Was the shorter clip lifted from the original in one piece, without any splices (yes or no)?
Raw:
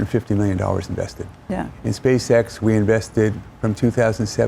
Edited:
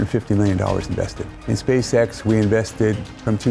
no